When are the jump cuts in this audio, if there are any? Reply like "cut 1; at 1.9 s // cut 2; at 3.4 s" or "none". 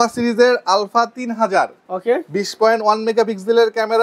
none